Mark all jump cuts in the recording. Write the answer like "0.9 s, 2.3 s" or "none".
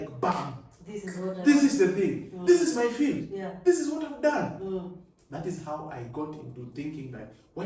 none